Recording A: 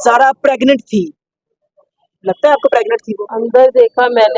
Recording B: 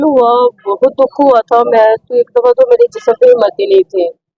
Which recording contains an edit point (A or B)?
A